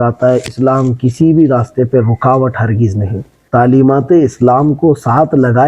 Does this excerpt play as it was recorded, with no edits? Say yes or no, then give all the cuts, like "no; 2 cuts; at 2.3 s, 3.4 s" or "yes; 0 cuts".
no; 1 cut; at 3.3 s